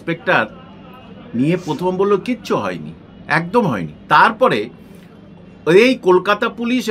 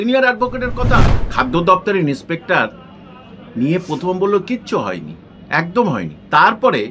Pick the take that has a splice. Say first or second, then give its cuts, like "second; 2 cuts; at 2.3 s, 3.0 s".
second; 1 cut; at 1.2 s